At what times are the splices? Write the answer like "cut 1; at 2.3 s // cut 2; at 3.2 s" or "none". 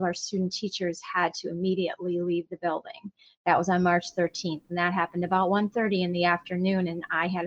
none